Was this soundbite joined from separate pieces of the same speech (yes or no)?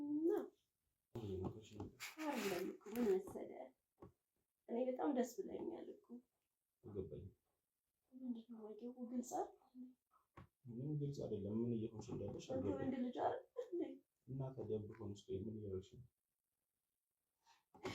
yes